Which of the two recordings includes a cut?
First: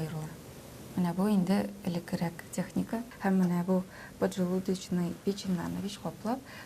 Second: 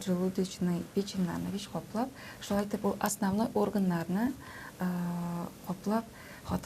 first; 1 cut; at 3.1 s

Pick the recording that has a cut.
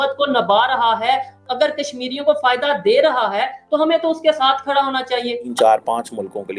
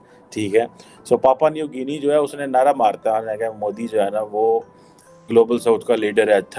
first; 1 cut; at 5.5 s

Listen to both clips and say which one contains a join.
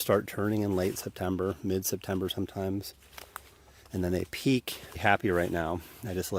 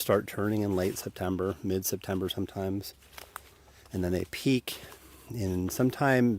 second; 1 cut; at 4.9 s

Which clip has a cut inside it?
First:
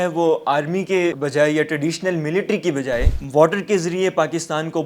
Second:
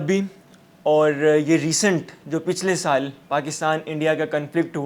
first; 2 cuts; at 1.2 s, 3.2 s

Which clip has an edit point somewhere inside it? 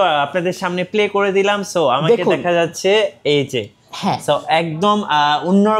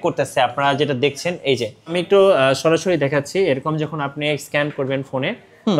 second; 1 cut; at 2.0 s

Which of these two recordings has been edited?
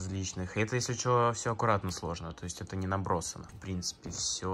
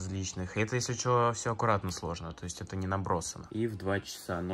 second; 1 cut; at 3.5 s

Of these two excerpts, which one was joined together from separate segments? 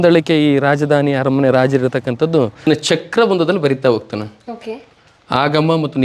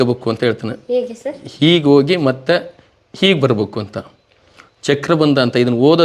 first; 1 cut; at 2.7 s

